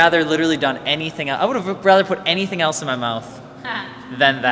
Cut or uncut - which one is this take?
uncut